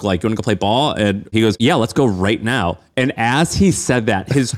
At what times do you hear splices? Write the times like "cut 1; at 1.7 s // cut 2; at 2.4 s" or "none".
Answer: cut 1; at 1.3 s